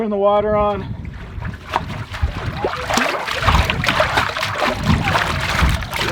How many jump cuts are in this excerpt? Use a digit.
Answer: 1